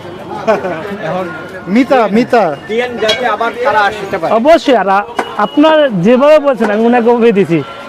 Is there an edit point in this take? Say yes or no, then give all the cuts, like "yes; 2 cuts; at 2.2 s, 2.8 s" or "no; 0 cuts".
no; 0 cuts